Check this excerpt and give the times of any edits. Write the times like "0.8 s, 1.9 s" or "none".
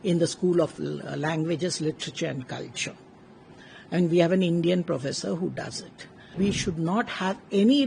6.3 s